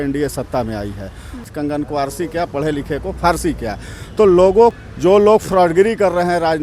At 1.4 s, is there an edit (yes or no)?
yes